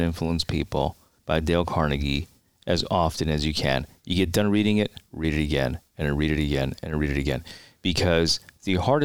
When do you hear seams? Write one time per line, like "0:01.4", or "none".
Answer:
0:01.1